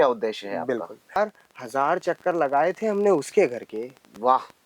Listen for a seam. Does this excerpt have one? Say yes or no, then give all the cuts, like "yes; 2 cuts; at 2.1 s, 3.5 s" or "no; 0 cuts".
yes; 1 cut; at 1.2 s